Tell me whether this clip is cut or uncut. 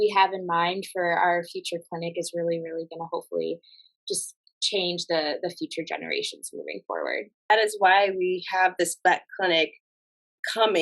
cut